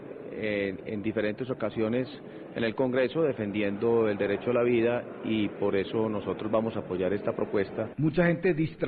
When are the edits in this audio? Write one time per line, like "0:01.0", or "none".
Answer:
0:06.8